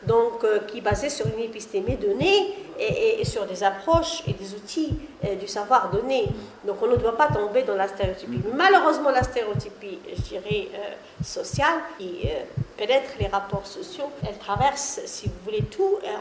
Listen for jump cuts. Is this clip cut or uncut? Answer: cut